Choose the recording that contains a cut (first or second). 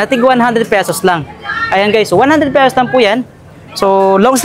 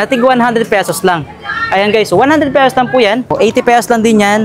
second